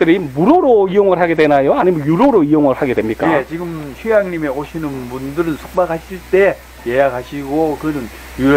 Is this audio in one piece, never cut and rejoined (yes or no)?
yes